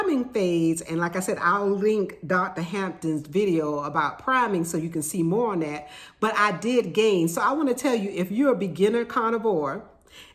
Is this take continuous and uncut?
yes; 0 cuts

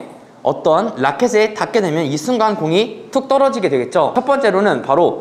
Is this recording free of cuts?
no; 1 cut; at 4.1 s

